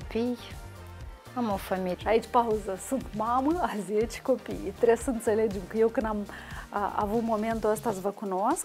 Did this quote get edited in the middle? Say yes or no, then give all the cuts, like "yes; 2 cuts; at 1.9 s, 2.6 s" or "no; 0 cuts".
no; 0 cuts